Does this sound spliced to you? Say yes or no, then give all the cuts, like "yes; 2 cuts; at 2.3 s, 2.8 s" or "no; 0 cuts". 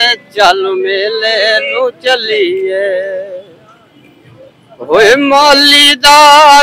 no; 0 cuts